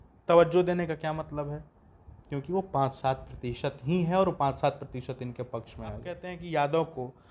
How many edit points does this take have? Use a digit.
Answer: 1